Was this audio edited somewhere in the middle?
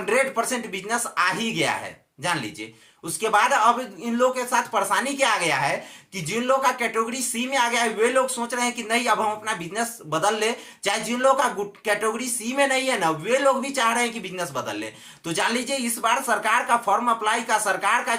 no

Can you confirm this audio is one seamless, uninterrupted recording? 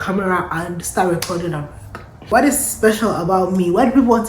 no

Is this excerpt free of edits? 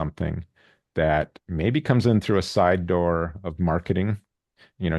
yes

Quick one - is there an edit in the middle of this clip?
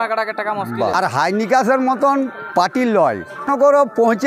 yes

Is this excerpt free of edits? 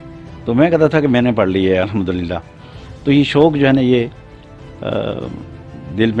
yes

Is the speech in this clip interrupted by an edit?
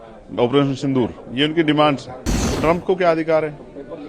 yes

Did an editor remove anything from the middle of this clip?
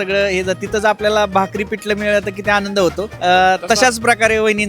yes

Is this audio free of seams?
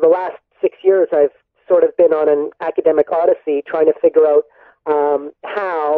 no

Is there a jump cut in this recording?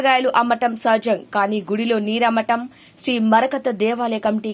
no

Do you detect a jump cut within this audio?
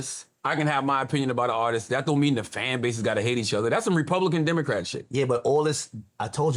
no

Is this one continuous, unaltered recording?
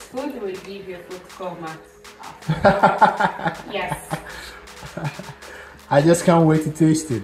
yes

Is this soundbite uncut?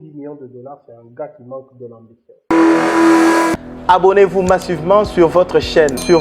no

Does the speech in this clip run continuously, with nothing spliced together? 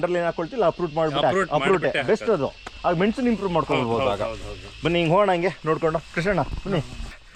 yes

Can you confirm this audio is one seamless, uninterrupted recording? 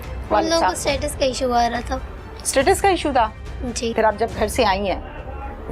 no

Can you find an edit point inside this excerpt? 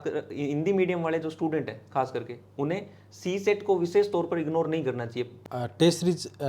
yes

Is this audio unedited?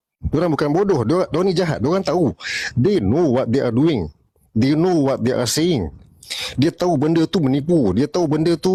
yes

